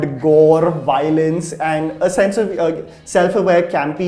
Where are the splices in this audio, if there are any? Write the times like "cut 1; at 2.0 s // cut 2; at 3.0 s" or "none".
none